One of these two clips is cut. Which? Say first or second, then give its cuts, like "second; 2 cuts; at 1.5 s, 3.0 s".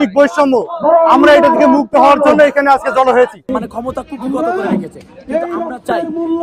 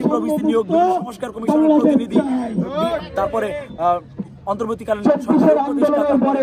first; 1 cut; at 3.6 s